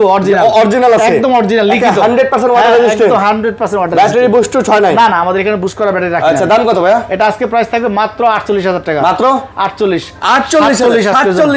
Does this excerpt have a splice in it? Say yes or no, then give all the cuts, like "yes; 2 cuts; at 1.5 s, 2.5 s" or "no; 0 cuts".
no; 0 cuts